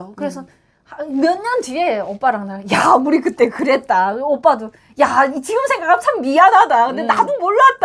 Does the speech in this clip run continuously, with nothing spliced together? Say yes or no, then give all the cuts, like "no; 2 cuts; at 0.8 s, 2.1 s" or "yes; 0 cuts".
yes; 0 cuts